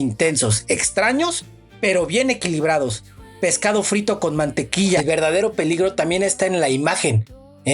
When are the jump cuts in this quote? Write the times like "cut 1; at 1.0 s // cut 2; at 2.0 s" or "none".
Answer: cut 1; at 5.0 s